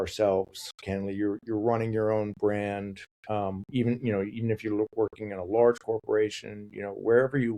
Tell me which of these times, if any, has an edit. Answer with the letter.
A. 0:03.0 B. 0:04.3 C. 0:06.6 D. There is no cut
D